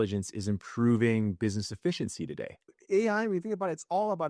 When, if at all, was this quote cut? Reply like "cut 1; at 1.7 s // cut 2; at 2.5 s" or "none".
cut 1; at 2.8 s